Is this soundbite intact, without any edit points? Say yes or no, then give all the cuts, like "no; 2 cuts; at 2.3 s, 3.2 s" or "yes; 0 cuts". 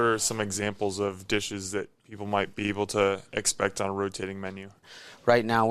no; 1 cut; at 4.8 s